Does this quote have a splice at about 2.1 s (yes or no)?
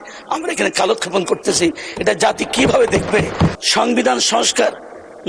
no